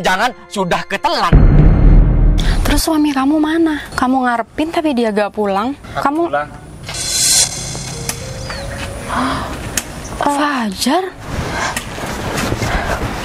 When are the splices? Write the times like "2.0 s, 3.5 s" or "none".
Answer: 1.3 s, 2.4 s, 3.9 s, 5.8 s